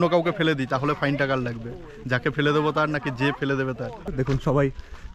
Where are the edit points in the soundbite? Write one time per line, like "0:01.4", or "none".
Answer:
0:04.1